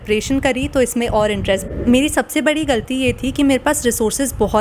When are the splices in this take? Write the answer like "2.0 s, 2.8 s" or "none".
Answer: 1.6 s